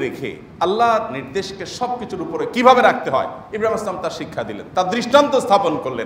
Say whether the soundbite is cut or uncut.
uncut